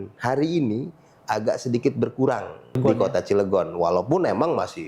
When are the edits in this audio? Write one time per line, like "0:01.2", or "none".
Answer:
0:02.8